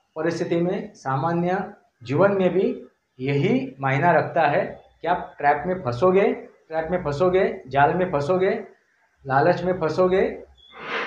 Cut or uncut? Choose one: cut